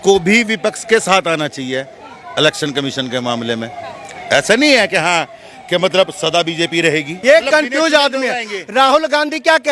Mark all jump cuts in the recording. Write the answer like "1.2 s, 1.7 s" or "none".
7.1 s

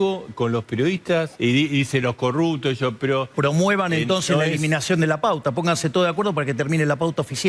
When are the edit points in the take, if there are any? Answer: 1.3 s, 3.3 s

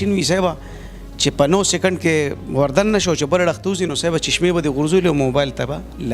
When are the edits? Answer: none

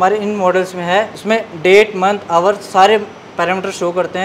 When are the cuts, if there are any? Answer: 1.2 s

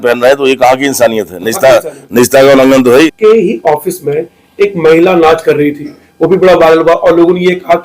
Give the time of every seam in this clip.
3.1 s

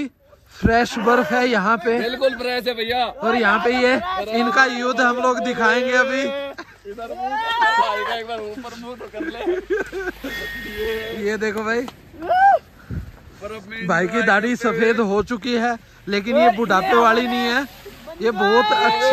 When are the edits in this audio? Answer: none

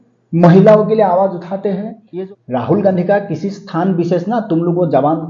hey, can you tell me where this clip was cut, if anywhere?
2.0 s

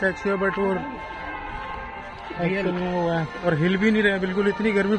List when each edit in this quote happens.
none

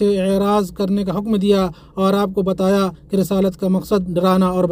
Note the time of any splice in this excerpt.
none

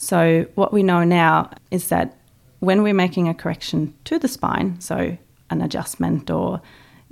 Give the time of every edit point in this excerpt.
1.6 s

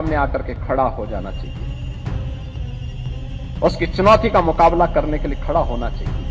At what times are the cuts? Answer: none

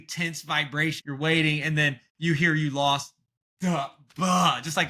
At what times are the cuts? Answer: 1.0 s

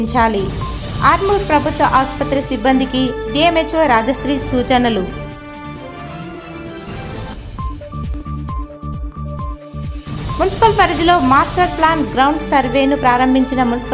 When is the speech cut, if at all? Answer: none

